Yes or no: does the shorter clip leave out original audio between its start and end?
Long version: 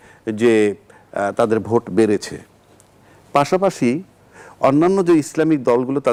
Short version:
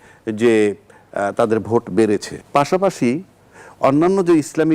yes